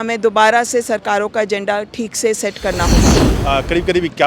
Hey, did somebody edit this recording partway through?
yes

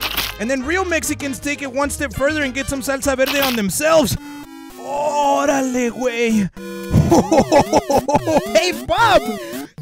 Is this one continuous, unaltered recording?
yes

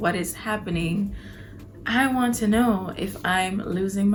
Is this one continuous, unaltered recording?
yes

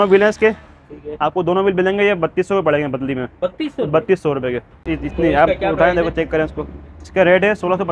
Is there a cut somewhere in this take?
yes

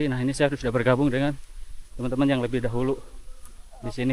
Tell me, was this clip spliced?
no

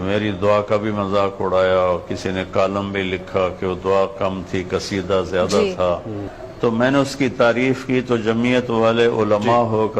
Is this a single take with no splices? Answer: no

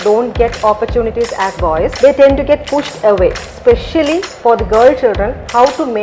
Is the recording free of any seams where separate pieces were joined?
no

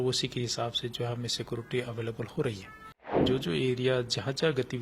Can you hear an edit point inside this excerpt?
yes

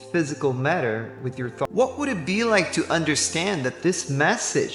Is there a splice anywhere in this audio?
yes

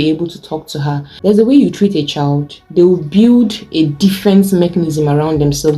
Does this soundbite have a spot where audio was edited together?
yes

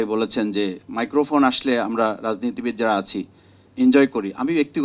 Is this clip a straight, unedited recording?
yes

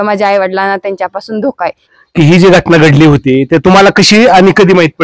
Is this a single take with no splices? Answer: no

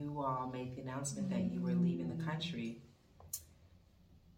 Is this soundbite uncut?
yes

